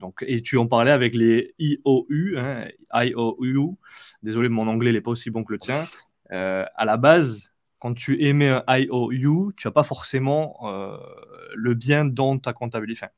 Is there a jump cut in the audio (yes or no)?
no